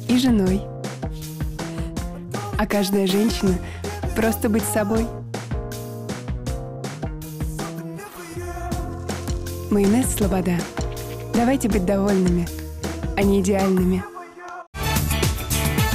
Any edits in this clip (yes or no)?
yes